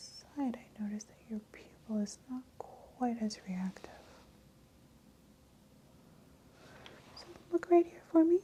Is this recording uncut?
yes; 0 cuts

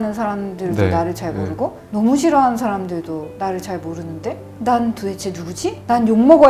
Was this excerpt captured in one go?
yes; 0 cuts

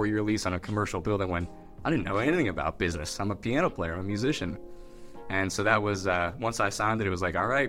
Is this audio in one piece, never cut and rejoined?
yes; 0 cuts

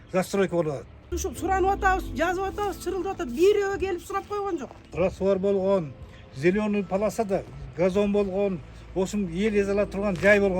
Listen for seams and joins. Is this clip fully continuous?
no; 2 cuts; at 1.1 s, 4.8 s

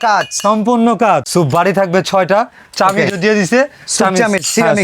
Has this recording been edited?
yes; 1 cut; at 1.3 s

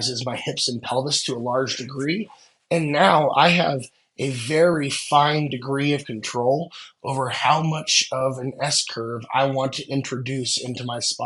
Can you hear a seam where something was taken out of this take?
no; 0 cuts

